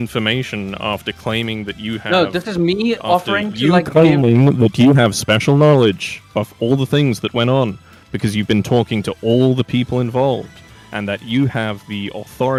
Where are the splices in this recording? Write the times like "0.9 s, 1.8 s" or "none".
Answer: none